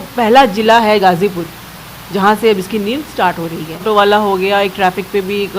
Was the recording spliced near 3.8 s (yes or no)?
yes